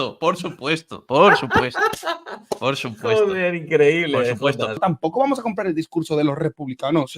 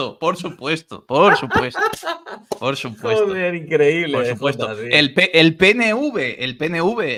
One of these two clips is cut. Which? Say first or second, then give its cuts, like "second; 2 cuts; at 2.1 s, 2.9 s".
first; 1 cut; at 4.8 s